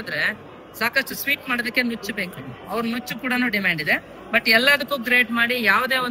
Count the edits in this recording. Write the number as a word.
zero